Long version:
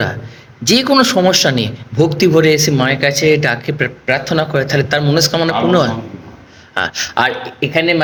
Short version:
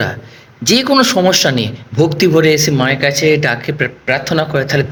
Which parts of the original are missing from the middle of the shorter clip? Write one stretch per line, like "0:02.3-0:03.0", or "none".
none